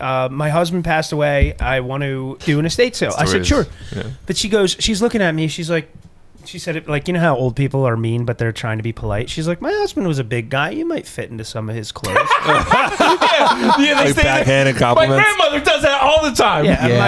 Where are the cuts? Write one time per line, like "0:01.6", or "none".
0:02.4